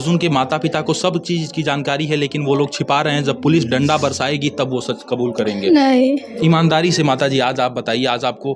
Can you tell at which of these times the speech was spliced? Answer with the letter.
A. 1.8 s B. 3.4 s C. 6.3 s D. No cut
C